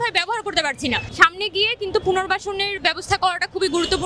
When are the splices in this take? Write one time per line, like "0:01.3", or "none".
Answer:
0:01.1